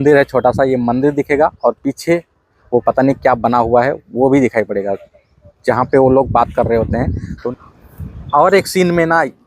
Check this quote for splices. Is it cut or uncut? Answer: cut